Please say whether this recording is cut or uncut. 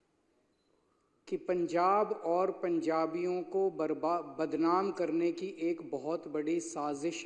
uncut